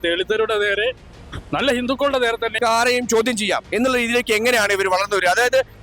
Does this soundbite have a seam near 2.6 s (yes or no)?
yes